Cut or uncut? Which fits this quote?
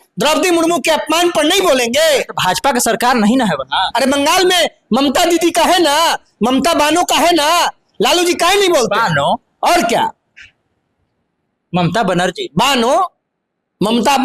uncut